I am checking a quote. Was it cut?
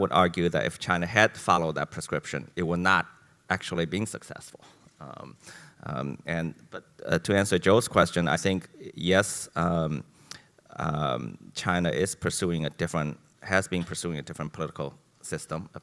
no; 0 cuts

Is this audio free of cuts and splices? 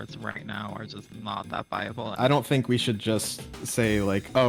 no; 2 cuts; at 2.1 s, 3.5 s

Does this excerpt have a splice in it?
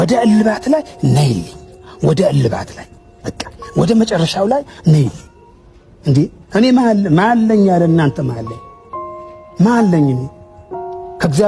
no; 0 cuts

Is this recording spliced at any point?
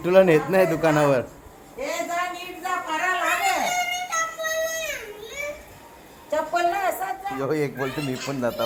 yes; 1 cut; at 7.3 s

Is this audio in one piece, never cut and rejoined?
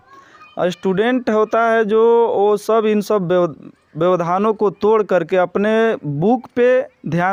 yes; 0 cuts

